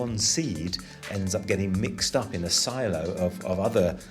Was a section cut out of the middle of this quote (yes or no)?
yes